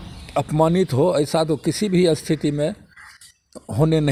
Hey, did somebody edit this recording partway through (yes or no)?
no